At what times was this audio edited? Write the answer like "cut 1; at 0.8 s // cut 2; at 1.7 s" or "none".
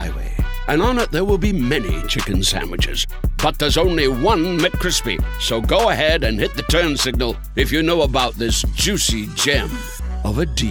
none